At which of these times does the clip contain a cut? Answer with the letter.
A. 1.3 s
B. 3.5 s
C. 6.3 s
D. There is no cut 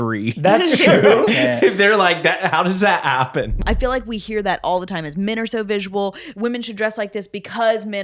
B